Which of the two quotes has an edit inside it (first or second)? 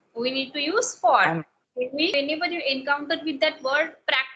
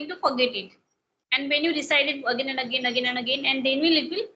first